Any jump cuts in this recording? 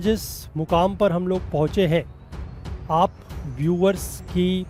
no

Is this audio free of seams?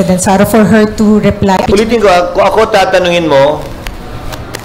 no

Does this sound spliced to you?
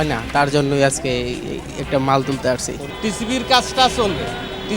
yes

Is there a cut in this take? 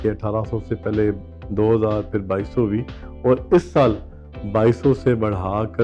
no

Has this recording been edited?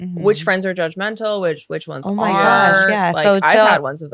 no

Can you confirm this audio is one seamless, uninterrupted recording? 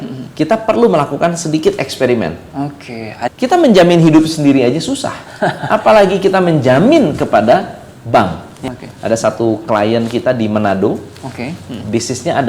no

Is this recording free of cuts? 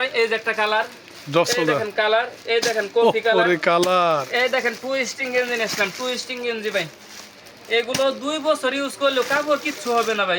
yes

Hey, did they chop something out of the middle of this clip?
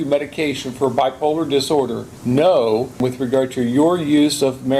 yes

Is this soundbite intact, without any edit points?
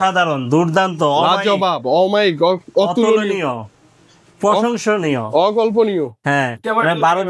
yes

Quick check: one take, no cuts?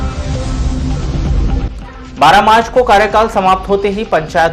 yes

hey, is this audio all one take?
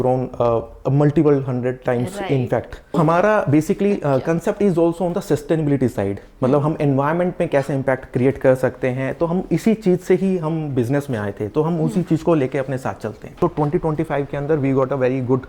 no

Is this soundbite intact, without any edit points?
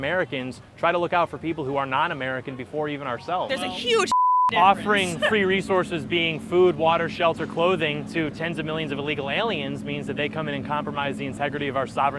no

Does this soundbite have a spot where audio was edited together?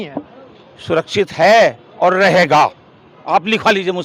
no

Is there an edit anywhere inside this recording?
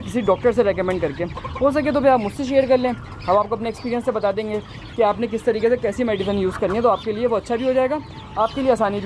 no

